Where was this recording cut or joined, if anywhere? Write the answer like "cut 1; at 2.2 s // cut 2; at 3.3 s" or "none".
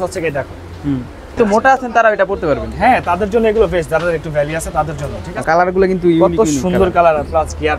cut 1; at 1.4 s // cut 2; at 5.3 s